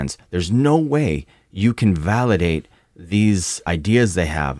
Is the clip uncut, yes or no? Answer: no